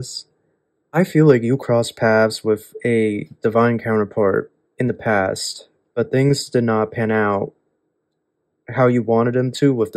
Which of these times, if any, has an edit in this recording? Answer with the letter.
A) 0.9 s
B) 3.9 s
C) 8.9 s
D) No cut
A